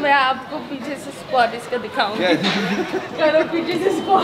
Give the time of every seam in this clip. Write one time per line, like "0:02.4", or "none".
none